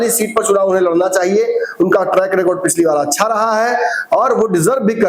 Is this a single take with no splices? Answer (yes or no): yes